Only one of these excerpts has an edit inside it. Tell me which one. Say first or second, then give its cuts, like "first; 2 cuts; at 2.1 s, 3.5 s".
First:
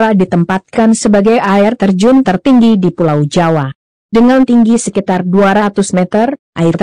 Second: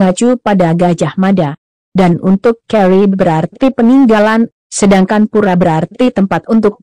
first; 2 cuts; at 1.0 s, 1.9 s